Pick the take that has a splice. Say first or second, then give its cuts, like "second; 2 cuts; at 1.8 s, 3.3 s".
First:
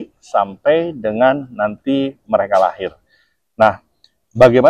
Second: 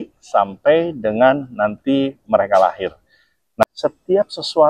second; 1 cut; at 3.6 s